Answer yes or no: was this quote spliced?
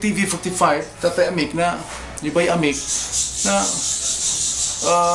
no